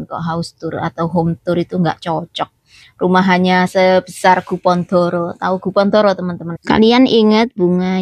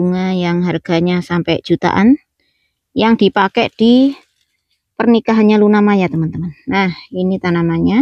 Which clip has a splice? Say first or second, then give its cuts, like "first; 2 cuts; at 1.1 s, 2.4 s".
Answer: first; 1 cut; at 6.5 s